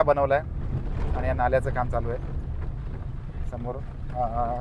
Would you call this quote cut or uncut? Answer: uncut